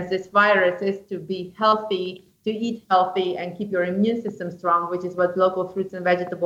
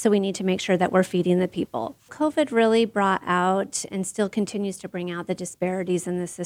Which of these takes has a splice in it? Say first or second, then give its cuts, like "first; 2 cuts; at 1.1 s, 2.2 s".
second; 1 cut; at 2.1 s